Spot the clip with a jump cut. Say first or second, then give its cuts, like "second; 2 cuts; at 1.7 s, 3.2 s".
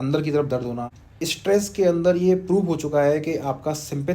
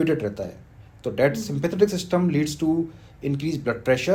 first; 1 cut; at 1.1 s